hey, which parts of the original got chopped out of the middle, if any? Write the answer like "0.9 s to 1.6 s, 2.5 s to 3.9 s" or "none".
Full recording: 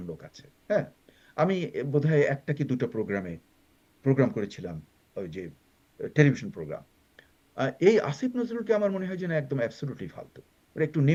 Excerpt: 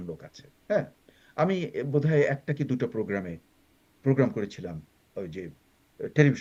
none